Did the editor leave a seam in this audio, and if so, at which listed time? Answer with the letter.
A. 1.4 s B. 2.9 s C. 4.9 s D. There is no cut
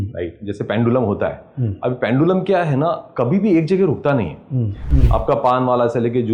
C